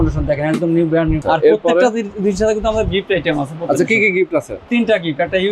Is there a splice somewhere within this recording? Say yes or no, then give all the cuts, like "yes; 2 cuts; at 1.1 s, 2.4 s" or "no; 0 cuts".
yes; 2 cuts; at 1.2 s, 4.6 s